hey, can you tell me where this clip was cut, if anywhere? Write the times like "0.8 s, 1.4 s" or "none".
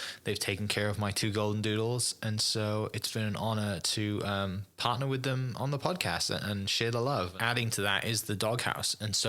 7.3 s